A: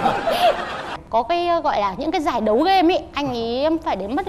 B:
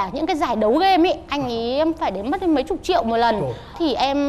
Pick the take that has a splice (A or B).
A